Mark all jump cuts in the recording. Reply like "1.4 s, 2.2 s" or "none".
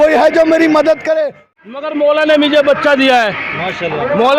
1.4 s